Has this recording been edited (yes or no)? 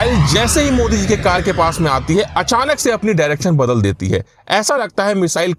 no